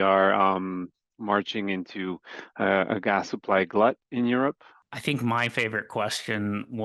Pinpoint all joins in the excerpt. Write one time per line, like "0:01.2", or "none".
0:04.7